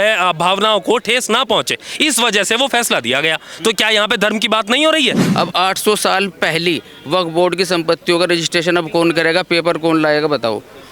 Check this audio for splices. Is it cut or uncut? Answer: cut